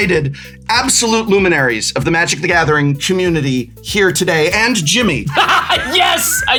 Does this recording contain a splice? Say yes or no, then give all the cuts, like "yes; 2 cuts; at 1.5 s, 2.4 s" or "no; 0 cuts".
no; 0 cuts